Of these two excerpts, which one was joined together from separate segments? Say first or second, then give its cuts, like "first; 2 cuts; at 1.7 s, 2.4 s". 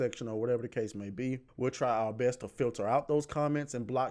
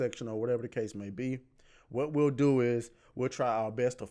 first; 1 cut; at 1.4 s